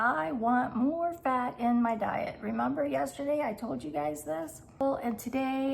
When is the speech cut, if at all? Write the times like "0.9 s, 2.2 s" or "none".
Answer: 4.8 s